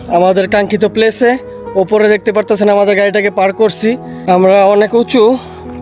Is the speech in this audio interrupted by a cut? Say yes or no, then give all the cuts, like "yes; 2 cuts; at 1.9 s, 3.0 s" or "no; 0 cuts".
yes; 1 cut; at 4.1 s